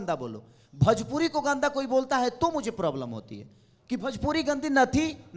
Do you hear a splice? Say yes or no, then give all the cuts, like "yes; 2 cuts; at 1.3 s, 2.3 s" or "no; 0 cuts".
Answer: no; 0 cuts